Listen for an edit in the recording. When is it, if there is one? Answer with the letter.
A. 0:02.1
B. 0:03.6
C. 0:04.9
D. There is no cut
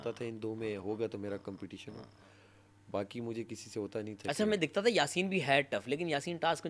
D